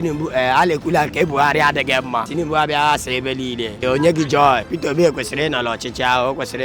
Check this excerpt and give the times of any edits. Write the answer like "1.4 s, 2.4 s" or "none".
2.3 s, 3.8 s, 4.7 s